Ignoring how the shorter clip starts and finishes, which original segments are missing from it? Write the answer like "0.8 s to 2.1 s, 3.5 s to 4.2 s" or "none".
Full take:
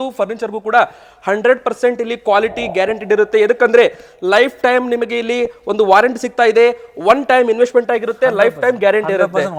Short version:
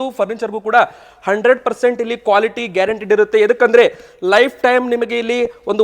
none